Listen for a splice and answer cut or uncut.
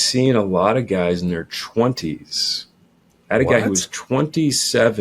uncut